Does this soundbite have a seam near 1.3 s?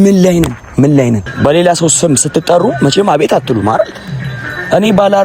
yes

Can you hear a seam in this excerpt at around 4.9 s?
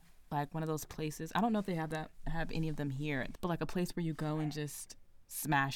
no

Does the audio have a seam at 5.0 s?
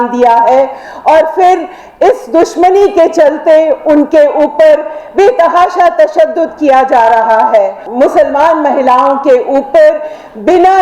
no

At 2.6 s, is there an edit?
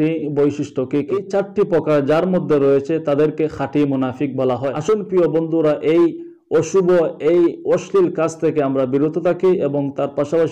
no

